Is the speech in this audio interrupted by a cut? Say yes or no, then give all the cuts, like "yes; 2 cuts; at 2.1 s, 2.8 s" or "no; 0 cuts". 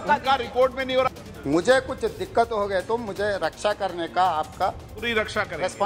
yes; 1 cut; at 1.1 s